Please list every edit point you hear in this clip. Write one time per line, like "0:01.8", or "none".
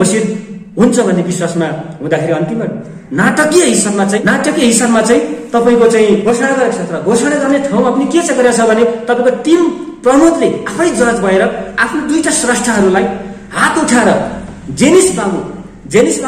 0:04.2
0:06.3